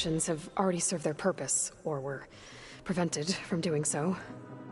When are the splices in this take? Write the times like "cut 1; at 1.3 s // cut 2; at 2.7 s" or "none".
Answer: none

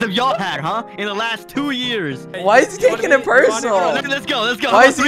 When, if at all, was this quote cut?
cut 1; at 2.4 s // cut 2; at 4.1 s

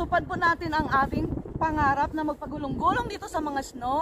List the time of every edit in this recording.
none

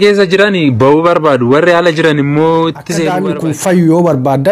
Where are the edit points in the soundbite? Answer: cut 1; at 3.1 s

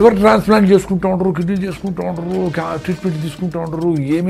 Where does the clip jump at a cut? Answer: none

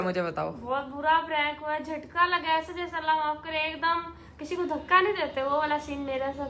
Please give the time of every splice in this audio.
none

